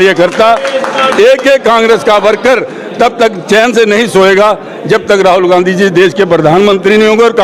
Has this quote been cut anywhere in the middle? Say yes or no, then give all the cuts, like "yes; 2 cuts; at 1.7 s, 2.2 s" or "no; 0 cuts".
no; 0 cuts